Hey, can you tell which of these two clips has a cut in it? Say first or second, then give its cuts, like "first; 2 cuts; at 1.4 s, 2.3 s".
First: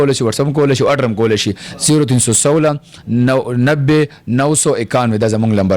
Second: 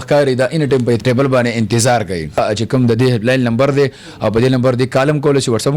second; 2 cuts; at 1.0 s, 2.4 s